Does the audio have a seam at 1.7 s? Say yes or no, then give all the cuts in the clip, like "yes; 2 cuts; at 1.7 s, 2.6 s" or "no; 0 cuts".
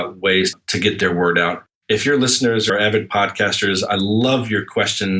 no; 0 cuts